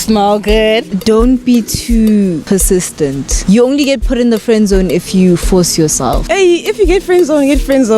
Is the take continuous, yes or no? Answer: no